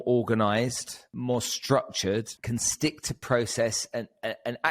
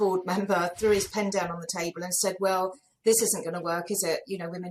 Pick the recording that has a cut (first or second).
first